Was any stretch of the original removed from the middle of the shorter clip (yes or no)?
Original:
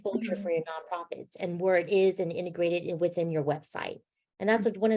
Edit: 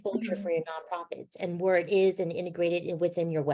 no